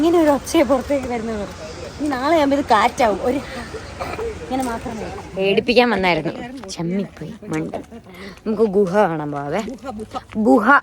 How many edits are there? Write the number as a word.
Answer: one